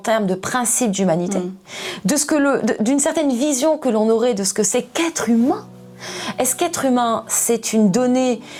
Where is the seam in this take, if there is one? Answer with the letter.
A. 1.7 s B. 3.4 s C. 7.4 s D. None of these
D